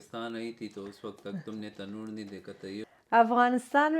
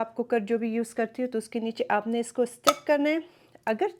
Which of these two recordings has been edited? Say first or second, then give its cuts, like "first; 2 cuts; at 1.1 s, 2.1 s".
first; 1 cut; at 2.8 s